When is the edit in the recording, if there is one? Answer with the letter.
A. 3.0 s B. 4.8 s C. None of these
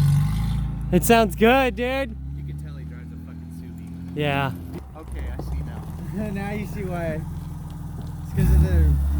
B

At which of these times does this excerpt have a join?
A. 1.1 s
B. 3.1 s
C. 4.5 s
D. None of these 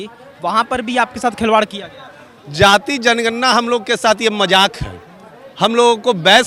D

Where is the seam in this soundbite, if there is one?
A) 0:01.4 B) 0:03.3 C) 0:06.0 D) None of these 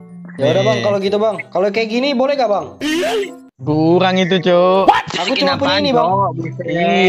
A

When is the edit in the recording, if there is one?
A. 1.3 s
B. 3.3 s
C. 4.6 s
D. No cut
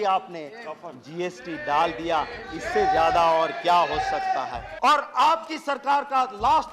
C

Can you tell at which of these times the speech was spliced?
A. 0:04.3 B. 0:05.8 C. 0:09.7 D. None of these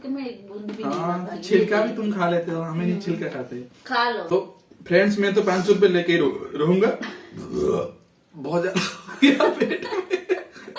A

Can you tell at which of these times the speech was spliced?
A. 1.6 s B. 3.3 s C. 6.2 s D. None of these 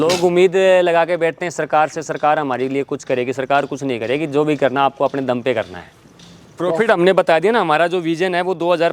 C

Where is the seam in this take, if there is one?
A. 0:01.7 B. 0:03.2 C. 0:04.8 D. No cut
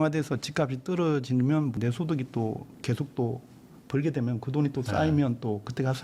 A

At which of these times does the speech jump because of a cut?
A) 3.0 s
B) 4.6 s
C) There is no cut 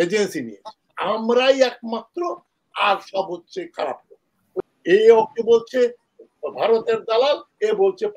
B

